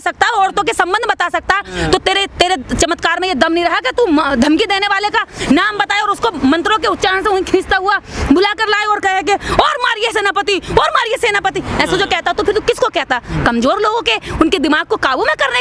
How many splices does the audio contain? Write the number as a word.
zero